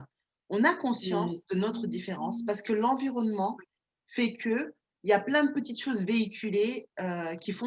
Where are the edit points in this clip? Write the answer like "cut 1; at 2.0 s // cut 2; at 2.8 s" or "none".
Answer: none